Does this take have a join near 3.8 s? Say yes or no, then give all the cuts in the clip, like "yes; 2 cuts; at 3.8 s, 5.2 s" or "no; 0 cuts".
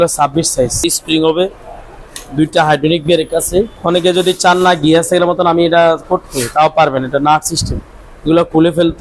yes; 2 cuts; at 0.8 s, 3.8 s